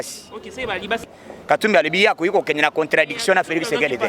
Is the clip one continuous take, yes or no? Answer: no